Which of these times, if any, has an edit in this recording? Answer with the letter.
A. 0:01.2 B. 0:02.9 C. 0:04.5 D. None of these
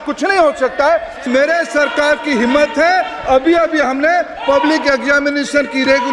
A